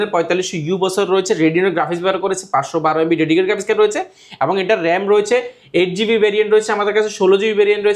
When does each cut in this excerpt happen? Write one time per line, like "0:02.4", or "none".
none